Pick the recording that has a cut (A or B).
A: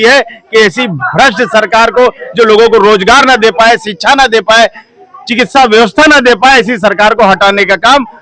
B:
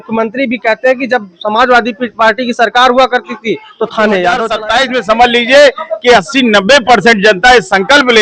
B